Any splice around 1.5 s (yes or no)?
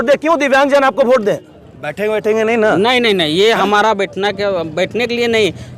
yes